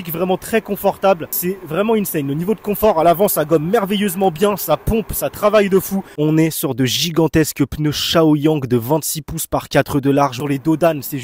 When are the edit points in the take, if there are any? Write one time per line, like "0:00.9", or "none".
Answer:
0:01.3
0:06.1
0:10.4